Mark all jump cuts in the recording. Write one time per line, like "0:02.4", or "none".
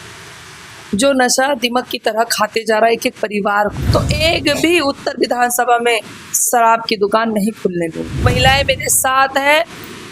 0:03.8
0:08.2